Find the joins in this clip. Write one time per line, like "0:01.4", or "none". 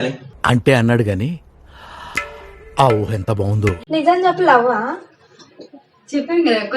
0:03.8